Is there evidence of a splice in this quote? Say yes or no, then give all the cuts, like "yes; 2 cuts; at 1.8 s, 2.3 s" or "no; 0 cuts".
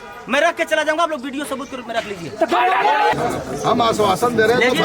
yes; 1 cut; at 3.1 s